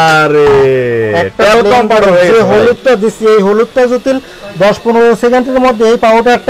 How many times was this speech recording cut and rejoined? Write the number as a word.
zero